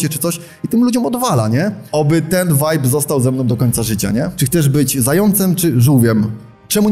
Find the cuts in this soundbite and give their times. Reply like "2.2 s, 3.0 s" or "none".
1.8 s, 4.4 s